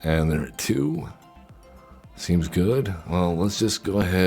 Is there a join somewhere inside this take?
yes; 1 cut; at 3.0 s

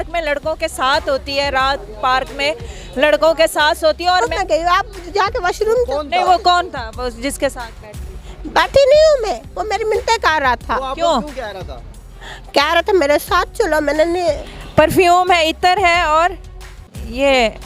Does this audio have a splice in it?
yes; 2 cuts; at 4.3 s, 14.5 s

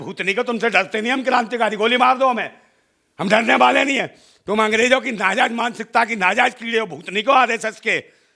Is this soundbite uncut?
yes; 0 cuts

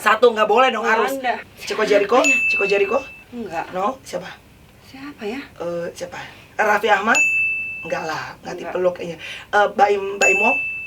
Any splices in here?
yes; 1 cut; at 1.4 s

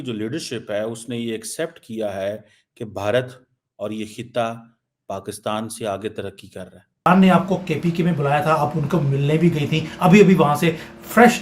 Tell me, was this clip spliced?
yes; 1 cut; at 7.1 s

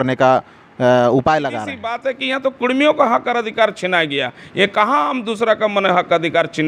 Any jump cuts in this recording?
yes; 1 cut; at 2.1 s

